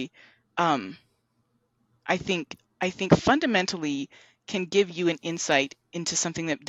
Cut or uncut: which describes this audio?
uncut